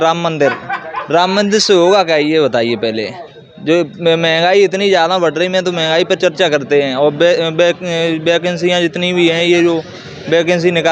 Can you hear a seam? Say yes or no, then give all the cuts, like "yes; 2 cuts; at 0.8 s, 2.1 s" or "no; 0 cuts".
no; 0 cuts